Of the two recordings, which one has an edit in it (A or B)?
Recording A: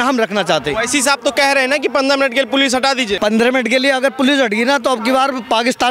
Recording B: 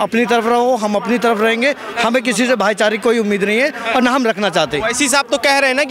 A